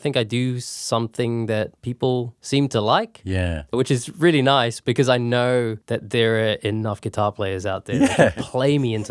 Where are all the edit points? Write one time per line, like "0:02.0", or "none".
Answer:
0:02.0
0:03.7
0:05.8